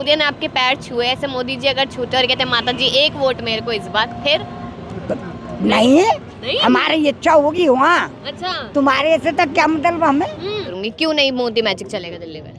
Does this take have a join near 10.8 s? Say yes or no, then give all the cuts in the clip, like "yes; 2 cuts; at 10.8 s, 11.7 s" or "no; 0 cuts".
yes; 1 cut; at 10.8 s